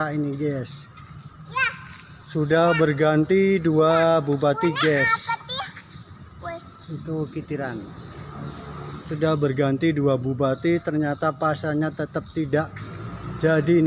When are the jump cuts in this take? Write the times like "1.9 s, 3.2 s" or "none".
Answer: none